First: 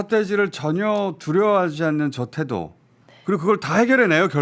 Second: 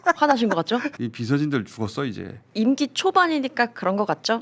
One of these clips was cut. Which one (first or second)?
second